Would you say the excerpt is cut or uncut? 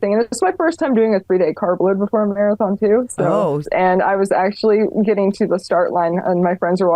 cut